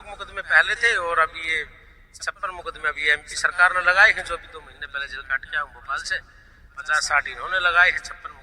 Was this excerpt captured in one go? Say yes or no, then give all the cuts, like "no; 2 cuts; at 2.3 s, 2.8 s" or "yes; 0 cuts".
yes; 0 cuts